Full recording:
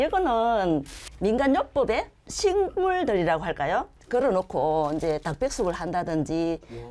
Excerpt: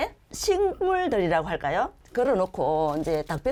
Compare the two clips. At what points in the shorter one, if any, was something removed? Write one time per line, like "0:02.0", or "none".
none

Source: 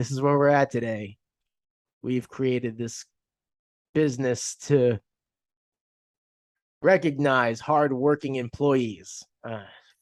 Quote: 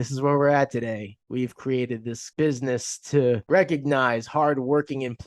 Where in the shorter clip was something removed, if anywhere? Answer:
0:01.1
0:02.2
0:03.4

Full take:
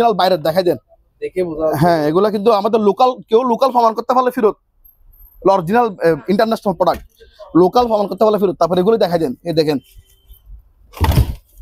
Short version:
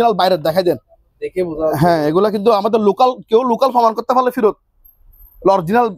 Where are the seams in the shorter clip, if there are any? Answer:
none

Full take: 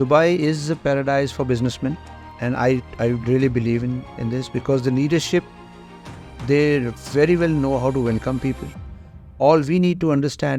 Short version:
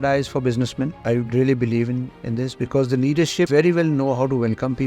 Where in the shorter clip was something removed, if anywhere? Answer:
0:01.0
0:03.5

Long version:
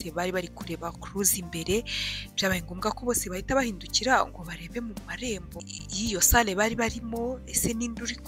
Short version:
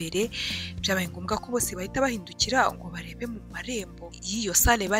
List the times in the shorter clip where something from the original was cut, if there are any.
0:04.1

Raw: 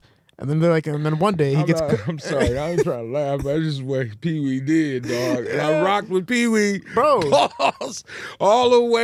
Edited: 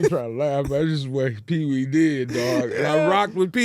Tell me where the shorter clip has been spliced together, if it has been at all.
none

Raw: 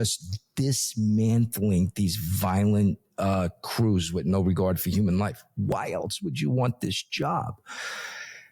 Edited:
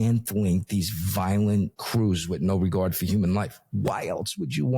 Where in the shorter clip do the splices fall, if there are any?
0:01.8

